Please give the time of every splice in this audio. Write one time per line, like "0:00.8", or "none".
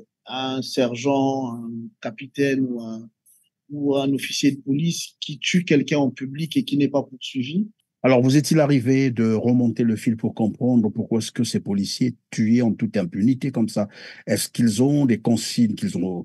0:07.8